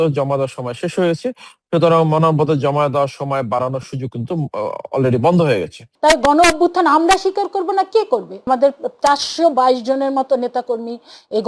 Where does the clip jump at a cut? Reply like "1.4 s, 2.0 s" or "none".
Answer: 5.8 s, 8.4 s